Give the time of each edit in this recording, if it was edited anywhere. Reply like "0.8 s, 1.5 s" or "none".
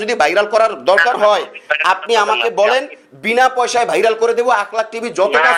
none